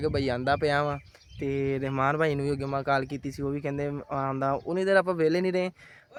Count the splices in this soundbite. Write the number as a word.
zero